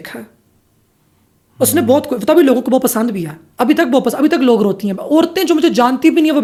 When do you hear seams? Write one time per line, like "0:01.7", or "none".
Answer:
none